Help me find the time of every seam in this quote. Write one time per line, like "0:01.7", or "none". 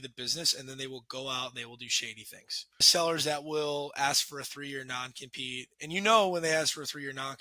0:02.9